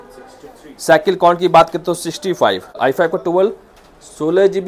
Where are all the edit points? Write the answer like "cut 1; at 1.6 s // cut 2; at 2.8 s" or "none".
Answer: cut 1; at 2.8 s